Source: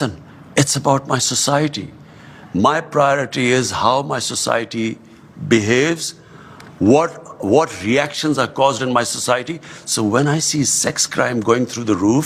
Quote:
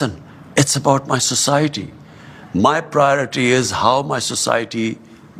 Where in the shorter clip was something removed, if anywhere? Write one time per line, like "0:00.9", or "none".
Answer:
none